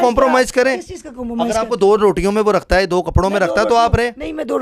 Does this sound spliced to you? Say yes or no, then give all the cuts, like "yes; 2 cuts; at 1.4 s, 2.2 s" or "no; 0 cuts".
no; 0 cuts